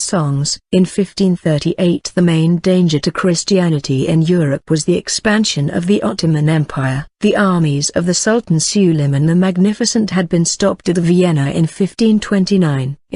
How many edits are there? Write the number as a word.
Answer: one